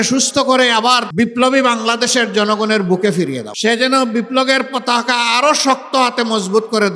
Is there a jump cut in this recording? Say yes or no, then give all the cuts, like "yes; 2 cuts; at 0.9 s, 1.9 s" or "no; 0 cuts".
yes; 2 cuts; at 1.1 s, 3.5 s